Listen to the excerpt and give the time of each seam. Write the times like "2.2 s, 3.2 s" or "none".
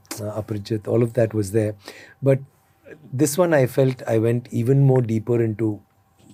none